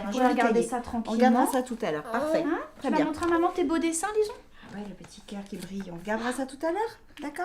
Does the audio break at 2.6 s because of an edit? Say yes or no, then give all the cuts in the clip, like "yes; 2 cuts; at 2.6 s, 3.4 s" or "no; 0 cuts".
yes; 1 cut; at 2.6 s